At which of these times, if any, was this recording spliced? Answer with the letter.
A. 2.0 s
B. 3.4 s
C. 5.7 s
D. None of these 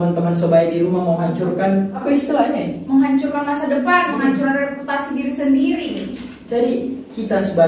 A